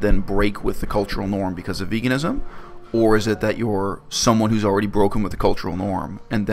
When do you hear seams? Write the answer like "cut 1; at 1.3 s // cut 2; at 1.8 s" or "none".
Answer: none